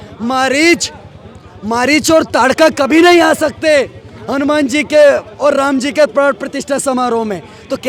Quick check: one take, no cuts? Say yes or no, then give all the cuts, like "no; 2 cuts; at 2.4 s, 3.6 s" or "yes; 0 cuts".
yes; 0 cuts